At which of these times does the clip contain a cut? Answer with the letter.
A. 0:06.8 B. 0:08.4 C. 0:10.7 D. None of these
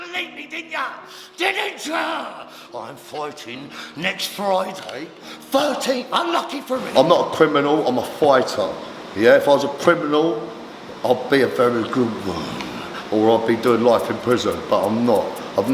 A